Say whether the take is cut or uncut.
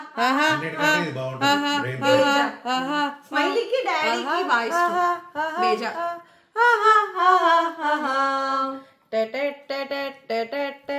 uncut